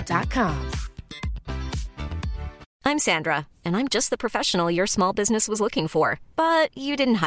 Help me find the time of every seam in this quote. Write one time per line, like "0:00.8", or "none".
0:02.6